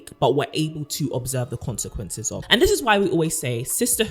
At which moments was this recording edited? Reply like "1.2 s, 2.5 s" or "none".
2.4 s